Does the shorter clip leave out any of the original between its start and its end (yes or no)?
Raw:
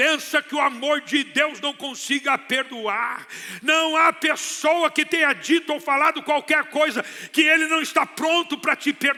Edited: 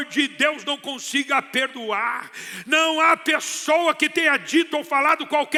no